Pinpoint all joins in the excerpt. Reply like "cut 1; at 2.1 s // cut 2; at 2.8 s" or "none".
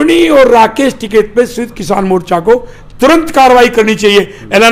none